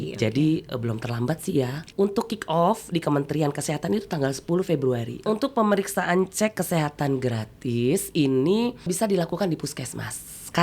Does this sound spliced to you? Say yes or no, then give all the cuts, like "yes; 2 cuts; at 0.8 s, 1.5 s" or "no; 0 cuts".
yes; 3 cuts; at 1.9 s, 5.2 s, 8.9 s